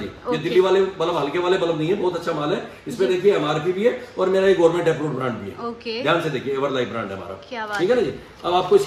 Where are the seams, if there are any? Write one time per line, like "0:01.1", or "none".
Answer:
none